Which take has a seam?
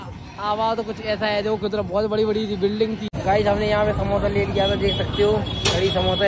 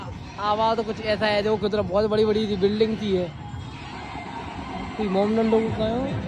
first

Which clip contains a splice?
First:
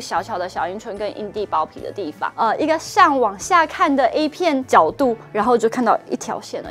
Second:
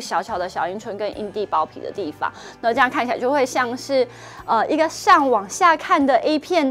first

